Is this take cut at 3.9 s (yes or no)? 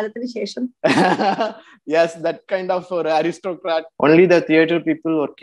yes